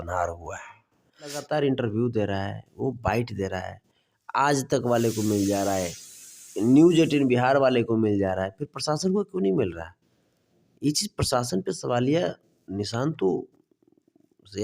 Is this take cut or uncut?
cut